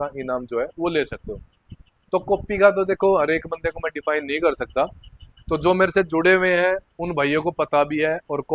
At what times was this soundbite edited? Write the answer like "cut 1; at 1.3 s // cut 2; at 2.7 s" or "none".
none

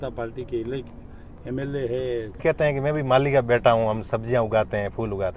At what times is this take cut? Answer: cut 1; at 2.4 s

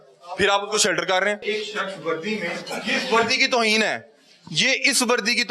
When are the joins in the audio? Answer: cut 1; at 1.4 s

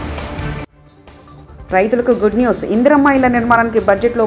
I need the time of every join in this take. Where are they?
none

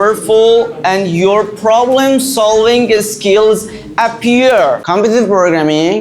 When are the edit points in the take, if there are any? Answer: cut 1; at 4.8 s

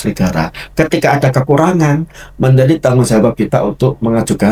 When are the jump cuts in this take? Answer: none

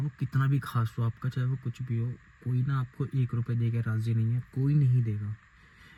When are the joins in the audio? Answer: none

